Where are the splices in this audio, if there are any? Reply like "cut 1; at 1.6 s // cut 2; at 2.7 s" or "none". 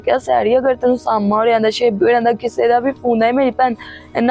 none